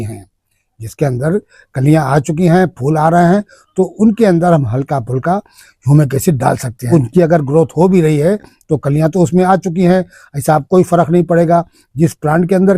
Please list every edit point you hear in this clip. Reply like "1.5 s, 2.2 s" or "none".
6.9 s